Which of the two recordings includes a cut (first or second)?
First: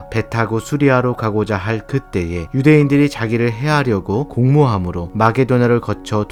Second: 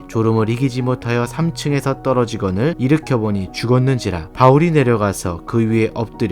second